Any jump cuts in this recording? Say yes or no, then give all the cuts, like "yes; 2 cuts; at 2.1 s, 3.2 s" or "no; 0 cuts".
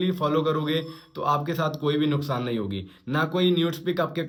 no; 0 cuts